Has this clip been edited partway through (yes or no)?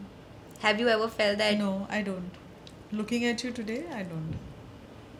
no